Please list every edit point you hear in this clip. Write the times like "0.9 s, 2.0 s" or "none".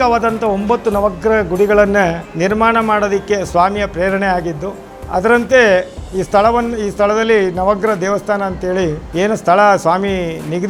none